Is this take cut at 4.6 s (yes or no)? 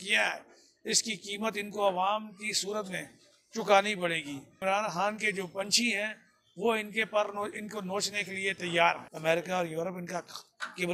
yes